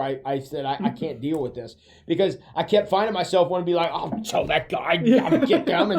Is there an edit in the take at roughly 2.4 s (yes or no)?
no